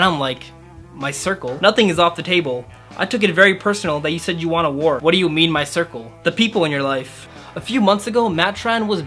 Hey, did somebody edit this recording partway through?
yes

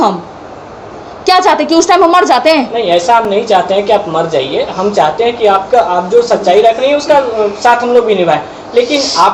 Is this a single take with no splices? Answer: yes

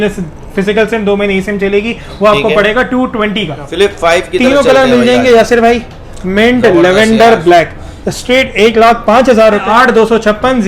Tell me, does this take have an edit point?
yes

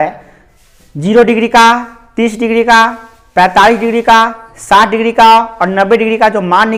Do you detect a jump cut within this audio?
no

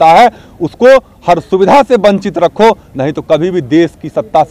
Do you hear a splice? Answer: no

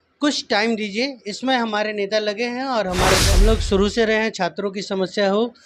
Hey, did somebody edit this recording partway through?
yes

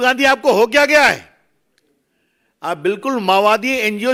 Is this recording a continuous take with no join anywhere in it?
yes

